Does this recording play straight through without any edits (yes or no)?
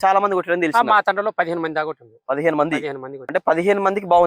no